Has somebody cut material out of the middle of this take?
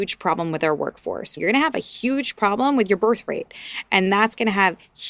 yes; 1 cut; at 1.3 s

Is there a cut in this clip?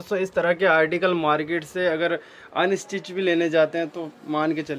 no; 0 cuts

